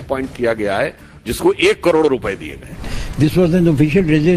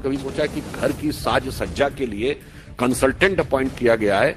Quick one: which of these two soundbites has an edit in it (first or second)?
first